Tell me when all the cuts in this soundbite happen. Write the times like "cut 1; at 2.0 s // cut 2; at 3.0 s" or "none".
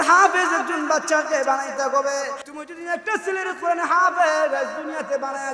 cut 1; at 2.4 s